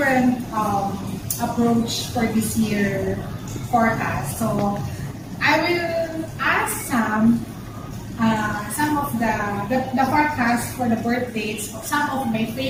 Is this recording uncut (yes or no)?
yes